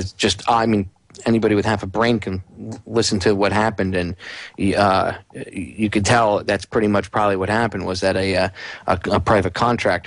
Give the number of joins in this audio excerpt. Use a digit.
1